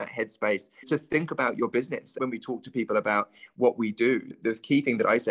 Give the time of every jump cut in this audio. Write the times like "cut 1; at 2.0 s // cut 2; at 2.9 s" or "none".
cut 1; at 0.8 s // cut 2; at 2.1 s // cut 3; at 4.3 s